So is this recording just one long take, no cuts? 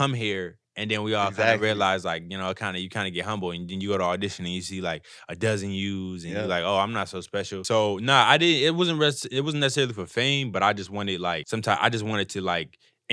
no; 2 cuts; at 7.6 s, 11.4 s

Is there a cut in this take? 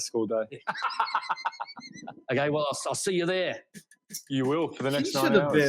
no; 0 cuts

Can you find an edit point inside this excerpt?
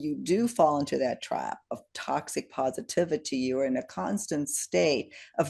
no; 0 cuts

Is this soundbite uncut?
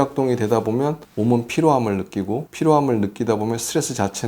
no; 2 cuts; at 1.0 s, 2.5 s

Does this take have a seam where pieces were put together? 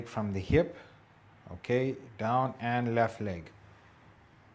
no; 0 cuts

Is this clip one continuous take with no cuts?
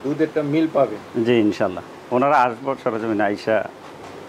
yes; 0 cuts

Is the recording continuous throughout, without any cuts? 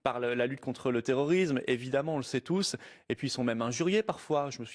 yes; 0 cuts

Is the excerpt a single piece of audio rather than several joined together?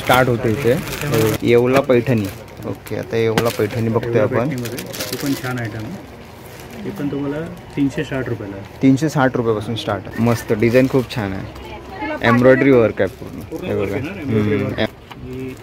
no; 3 cuts; at 1.4 s, 10.1 s, 14.9 s

